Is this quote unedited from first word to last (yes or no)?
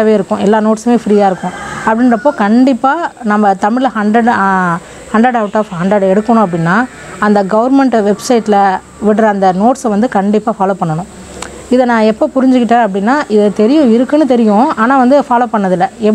yes